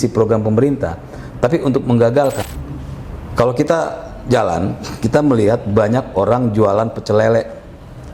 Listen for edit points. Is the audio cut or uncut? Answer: cut